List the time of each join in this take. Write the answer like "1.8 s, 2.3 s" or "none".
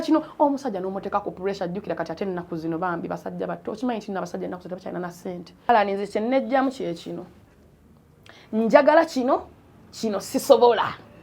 5.7 s